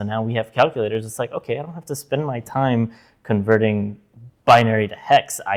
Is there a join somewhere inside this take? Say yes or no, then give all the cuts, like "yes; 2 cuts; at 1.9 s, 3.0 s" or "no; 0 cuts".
no; 0 cuts